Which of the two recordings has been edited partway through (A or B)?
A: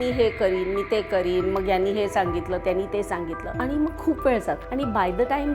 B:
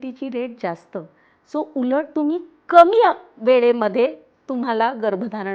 A